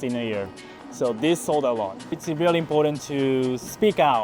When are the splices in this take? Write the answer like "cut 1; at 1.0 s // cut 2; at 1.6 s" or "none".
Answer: cut 1; at 2.2 s